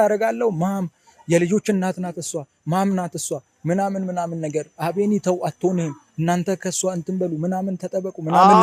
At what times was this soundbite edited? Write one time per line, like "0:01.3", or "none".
none